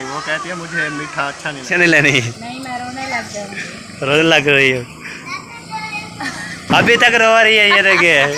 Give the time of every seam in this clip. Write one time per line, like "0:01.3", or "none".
0:01.7
0:05.5